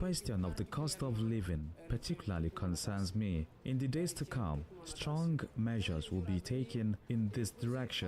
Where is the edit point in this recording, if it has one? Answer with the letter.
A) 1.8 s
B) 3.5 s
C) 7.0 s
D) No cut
B